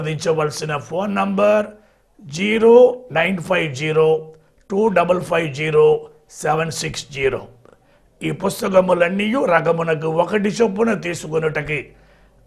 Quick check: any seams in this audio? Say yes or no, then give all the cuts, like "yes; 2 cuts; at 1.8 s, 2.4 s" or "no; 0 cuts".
no; 0 cuts